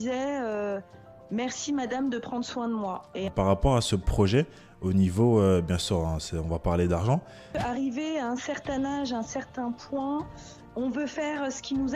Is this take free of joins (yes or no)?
no